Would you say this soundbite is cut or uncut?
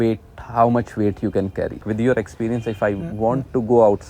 cut